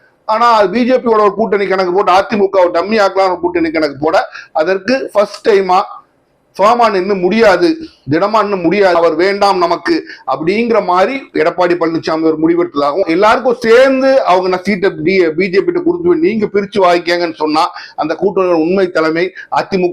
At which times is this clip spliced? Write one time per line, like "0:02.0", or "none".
0:13.0